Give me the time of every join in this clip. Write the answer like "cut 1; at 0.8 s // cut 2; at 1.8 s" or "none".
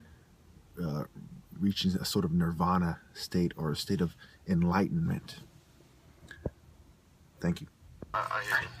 none